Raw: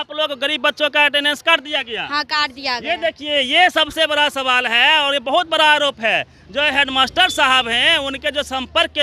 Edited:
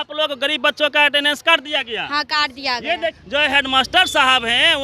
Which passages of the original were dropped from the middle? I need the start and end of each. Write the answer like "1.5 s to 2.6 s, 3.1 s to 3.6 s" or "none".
3.2 s to 6.4 s